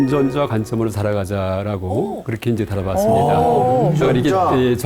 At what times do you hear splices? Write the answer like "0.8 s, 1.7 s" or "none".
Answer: none